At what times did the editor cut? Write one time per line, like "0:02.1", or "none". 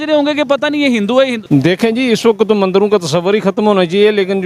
0:01.4